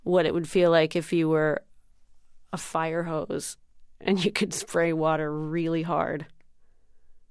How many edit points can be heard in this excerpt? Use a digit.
1